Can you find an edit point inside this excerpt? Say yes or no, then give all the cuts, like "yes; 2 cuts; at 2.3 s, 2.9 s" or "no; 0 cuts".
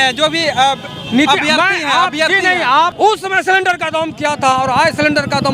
yes; 1 cut; at 2.9 s